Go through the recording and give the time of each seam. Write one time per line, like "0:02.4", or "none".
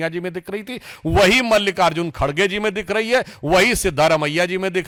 none